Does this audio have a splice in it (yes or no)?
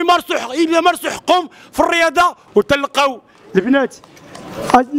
yes